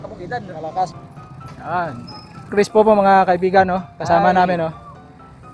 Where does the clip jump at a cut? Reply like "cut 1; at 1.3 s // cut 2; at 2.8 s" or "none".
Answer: cut 1; at 0.9 s